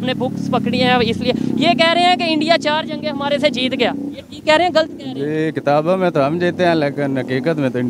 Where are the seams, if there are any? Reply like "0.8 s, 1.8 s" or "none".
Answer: none